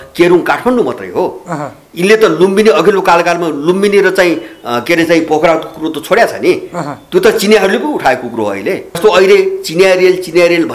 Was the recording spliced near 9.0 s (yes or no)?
yes